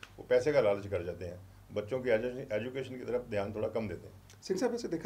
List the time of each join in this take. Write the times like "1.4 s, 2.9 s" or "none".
none